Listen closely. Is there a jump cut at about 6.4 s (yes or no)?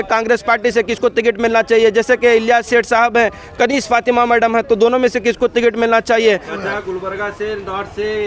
yes